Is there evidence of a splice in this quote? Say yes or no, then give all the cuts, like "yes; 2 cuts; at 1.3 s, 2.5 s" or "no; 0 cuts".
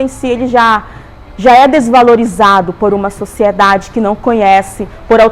no; 0 cuts